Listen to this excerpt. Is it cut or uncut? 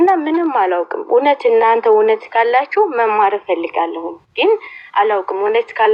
uncut